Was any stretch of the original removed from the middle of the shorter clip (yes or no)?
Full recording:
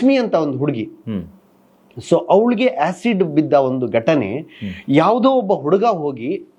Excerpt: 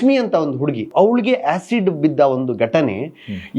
yes